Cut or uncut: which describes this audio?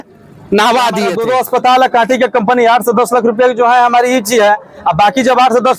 cut